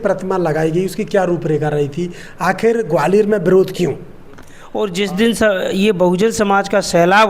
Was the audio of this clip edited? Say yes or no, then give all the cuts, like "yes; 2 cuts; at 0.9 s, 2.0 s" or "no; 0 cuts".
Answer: yes; 1 cut; at 4.9 s